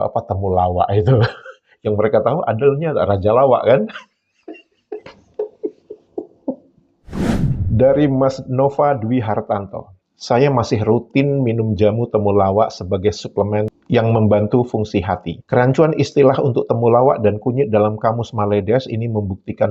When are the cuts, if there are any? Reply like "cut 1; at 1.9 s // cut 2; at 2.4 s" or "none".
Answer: none